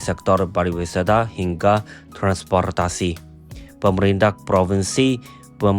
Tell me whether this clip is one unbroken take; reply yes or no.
yes